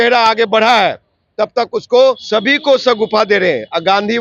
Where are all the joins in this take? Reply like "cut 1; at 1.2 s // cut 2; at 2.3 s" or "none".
cut 1; at 2.2 s